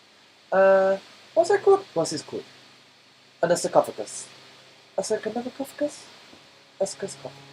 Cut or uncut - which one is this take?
uncut